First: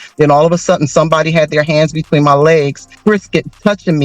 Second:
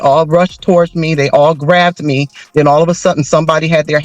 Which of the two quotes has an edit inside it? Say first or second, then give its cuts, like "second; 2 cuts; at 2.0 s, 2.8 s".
first; 1 cut; at 2.8 s